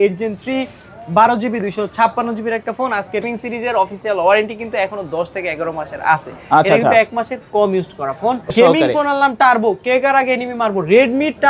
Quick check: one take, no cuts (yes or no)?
no